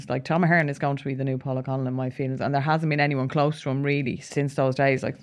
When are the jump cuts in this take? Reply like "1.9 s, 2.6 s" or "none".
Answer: 1.4 s, 4.2 s